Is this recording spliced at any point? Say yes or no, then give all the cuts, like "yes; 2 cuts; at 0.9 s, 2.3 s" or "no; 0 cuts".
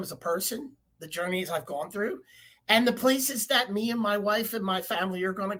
no; 0 cuts